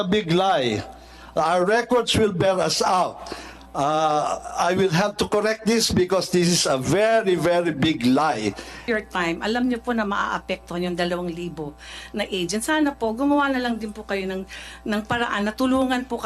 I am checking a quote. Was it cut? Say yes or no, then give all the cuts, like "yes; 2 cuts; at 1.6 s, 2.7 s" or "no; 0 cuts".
yes; 1 cut; at 8.9 s